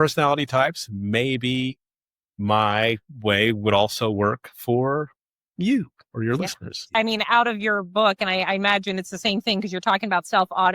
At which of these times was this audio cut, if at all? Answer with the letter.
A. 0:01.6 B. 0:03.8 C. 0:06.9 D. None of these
C